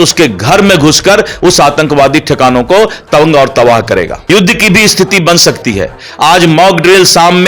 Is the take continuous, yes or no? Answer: no